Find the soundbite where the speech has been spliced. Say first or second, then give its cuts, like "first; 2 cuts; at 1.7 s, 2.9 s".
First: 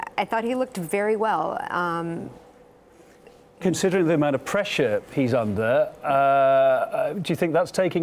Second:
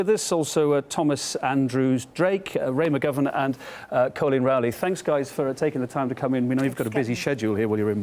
second; 1 cut; at 3.6 s